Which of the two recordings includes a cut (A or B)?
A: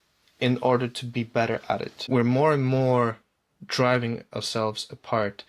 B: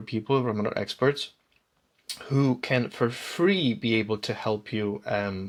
A